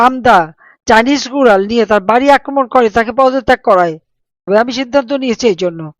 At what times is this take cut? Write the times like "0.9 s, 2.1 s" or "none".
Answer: 4.5 s

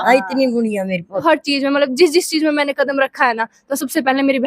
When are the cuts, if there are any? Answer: 1.2 s

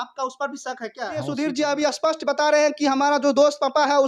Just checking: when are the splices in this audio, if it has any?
1.3 s

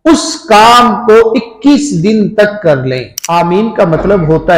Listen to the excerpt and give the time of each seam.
3.1 s

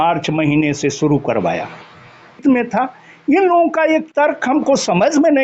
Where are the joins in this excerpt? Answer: 2.4 s

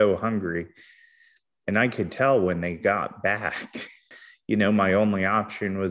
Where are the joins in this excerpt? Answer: 4.0 s

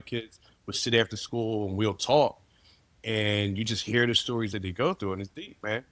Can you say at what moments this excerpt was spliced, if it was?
4.6 s

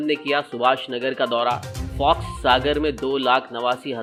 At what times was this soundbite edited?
none

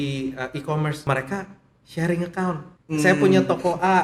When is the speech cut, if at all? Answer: 1.0 s, 2.7 s

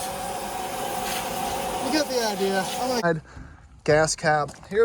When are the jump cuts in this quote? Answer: 3.0 s

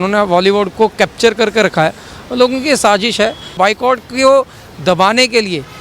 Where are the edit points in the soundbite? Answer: 3.5 s

